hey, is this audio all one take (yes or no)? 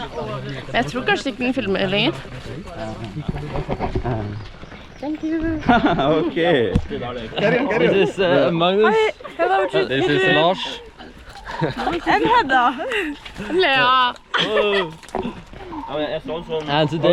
no